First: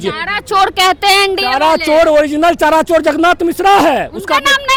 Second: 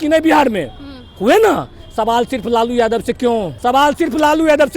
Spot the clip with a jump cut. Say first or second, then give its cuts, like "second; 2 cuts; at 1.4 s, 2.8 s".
second; 1 cut; at 3.5 s